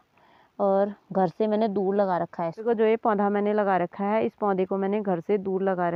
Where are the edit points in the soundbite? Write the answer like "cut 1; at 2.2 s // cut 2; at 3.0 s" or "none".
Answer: none